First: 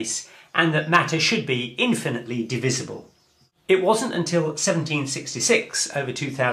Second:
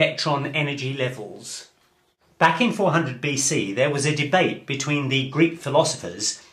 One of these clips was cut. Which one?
first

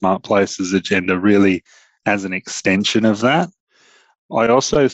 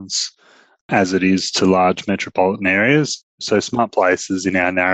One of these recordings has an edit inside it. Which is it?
second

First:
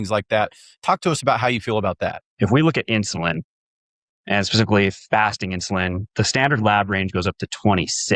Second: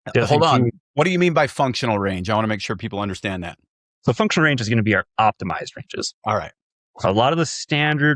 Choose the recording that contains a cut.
first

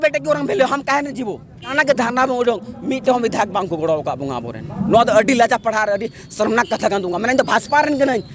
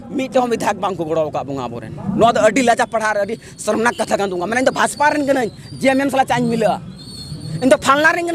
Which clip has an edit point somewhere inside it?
first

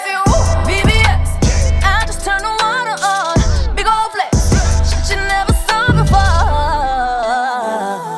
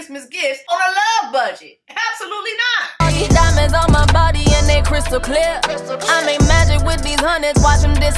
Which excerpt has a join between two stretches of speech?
second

